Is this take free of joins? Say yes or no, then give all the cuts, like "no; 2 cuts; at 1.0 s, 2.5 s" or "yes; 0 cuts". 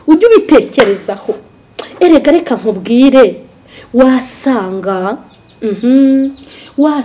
yes; 0 cuts